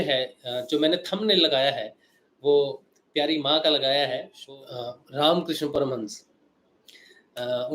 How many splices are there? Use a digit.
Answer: 1